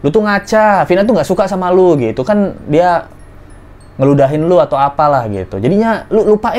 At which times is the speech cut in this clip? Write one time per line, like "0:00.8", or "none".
none